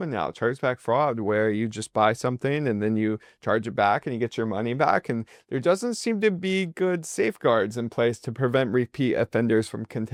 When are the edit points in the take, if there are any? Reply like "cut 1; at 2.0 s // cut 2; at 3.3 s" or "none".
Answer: none